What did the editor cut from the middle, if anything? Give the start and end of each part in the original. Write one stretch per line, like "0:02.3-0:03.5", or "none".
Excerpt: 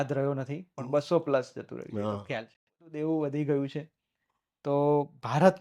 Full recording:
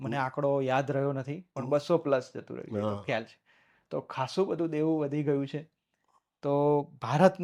0:03.7-0:04.7